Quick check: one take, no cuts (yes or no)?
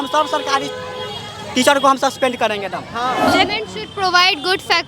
no